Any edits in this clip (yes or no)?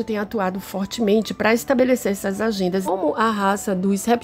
yes